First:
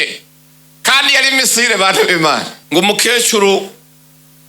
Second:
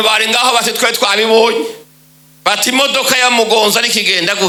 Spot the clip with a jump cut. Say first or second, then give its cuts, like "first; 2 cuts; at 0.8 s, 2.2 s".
first; 1 cut; at 2.5 s